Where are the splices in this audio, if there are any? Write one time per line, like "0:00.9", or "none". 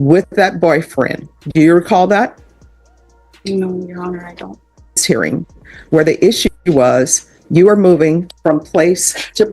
0:05.0